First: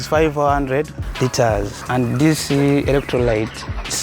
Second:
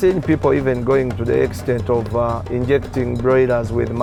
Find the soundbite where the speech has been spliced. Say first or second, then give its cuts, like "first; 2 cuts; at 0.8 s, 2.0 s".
first; 2 cuts; at 1.0 s, 1.8 s